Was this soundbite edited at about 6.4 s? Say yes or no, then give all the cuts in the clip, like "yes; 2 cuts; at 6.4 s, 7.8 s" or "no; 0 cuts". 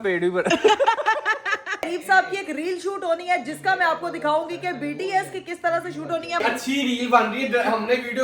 yes; 2 cuts; at 1.8 s, 6.4 s